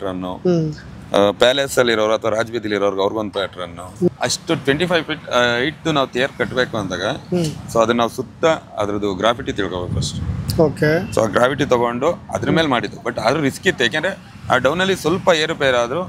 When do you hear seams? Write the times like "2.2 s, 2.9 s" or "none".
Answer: 4.1 s

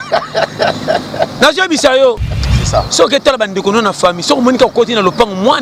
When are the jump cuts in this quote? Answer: 2.5 s

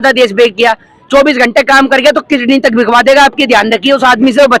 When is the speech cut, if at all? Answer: none

